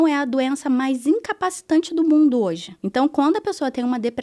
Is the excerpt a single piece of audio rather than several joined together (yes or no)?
no